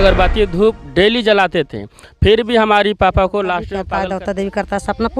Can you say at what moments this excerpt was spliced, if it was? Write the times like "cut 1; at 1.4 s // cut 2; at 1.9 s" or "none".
cut 1; at 3.7 s